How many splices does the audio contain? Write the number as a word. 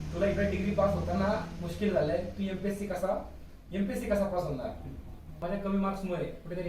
one